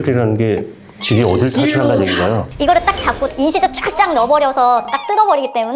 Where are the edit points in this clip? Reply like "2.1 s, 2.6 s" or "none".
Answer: 2.5 s

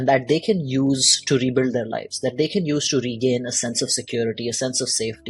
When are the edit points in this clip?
none

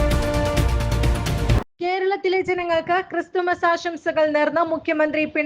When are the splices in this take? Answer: 1.3 s

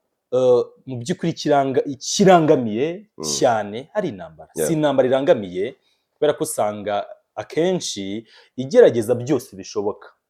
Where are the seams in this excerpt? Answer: none

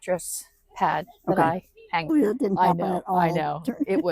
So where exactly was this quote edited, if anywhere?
2.1 s

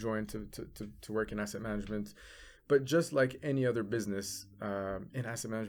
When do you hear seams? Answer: none

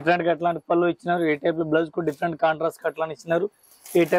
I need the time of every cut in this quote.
none

